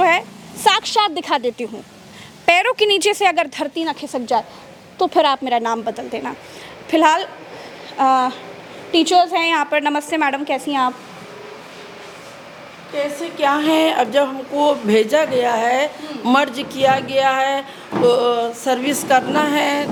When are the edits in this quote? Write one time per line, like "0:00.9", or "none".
none